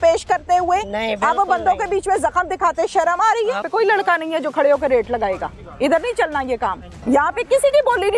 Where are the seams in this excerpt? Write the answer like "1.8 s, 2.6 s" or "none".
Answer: 3.7 s, 6.9 s